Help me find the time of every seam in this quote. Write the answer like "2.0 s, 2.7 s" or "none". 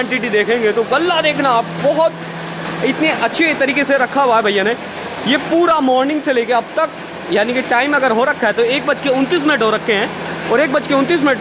none